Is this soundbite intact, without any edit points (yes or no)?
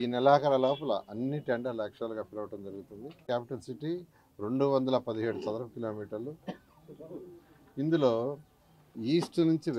no